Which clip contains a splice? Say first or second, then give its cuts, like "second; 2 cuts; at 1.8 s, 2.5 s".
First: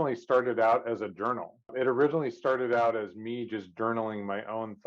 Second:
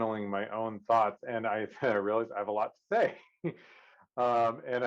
first; 1 cut; at 1.7 s